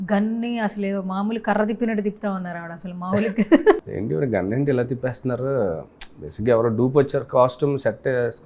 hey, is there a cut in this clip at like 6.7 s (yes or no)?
no